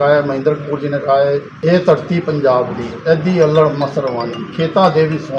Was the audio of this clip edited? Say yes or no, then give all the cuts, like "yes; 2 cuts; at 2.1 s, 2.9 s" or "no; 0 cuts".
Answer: yes; 1 cut; at 1.5 s